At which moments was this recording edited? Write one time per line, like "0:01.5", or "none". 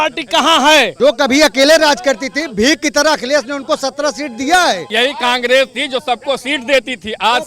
0:00.9
0:04.9

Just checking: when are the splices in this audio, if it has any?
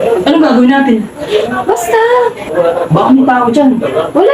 0:02.4

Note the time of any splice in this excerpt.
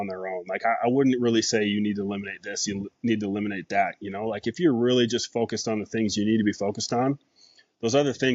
none

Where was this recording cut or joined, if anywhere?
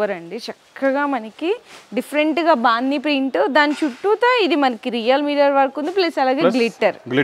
none

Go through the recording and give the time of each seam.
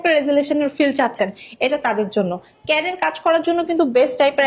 none

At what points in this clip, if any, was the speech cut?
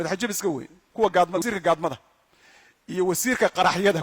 0:01.4

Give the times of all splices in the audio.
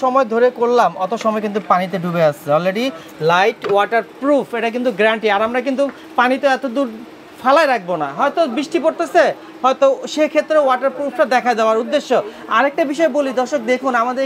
none

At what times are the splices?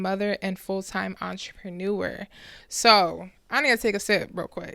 none

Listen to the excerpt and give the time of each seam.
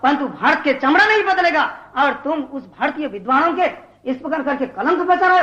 none

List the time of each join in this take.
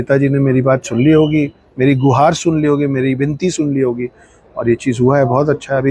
none

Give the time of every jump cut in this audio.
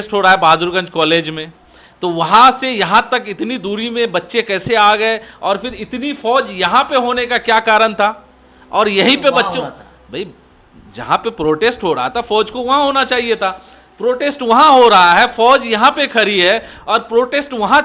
none

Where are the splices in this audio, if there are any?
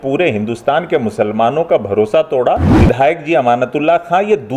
0:02.7

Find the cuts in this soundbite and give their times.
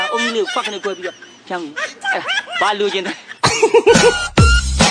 none

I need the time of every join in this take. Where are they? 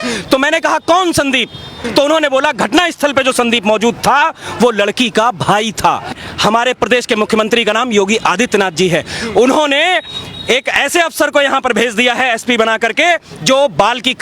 0:01.8
0:06.2

